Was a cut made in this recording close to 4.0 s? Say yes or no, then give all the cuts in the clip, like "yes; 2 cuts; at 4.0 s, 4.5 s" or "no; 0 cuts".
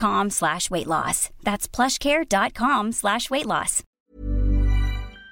yes; 1 cut; at 4.0 s